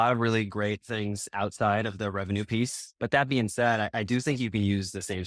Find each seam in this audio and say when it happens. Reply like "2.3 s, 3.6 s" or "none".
2.9 s